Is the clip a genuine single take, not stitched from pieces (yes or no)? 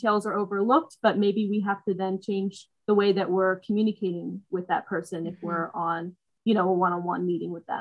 yes